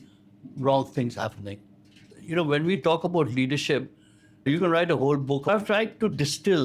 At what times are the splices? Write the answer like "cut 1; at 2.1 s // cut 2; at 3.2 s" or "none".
cut 1; at 2.1 s // cut 2; at 5.5 s

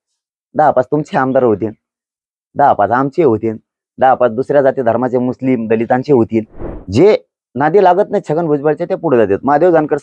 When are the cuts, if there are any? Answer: cut 1; at 6.6 s

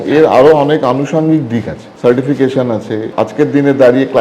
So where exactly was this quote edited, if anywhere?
cut 1; at 1.8 s // cut 2; at 3.1 s

